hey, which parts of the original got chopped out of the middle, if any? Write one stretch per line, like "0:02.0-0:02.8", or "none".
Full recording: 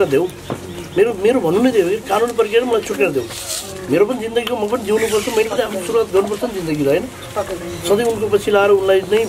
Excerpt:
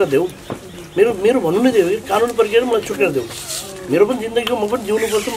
none